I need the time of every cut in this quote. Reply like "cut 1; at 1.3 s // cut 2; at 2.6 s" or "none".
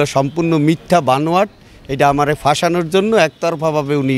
none